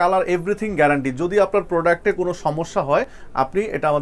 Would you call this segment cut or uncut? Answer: uncut